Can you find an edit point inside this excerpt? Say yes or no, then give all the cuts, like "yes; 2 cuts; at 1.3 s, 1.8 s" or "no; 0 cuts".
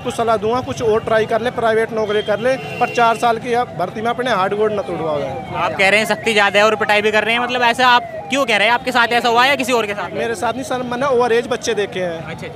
no; 0 cuts